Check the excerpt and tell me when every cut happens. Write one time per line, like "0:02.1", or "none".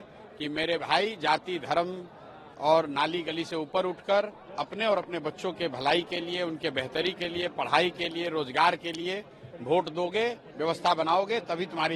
none